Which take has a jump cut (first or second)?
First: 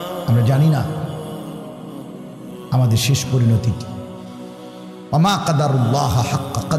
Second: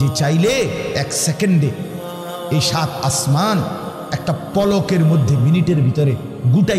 first